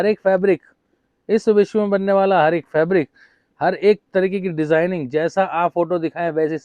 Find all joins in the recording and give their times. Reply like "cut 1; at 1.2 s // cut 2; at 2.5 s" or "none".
none